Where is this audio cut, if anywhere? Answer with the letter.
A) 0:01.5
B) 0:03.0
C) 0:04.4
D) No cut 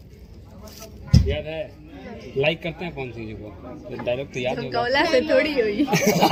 D